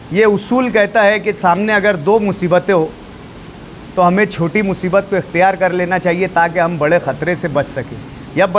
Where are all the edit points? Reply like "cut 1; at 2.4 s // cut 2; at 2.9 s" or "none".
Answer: none